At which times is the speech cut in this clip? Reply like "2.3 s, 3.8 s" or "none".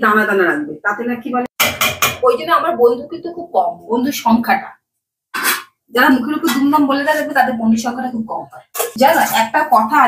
1.5 s, 8.9 s